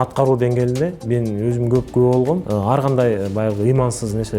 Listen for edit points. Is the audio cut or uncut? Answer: cut